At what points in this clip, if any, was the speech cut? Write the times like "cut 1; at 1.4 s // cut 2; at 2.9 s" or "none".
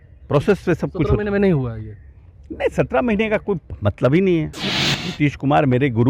cut 1; at 4.6 s